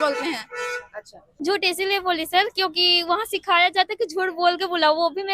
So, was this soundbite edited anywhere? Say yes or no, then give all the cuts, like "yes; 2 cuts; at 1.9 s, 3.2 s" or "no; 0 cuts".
yes; 1 cut; at 1.3 s